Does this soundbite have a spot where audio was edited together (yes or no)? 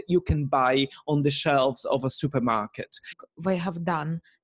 yes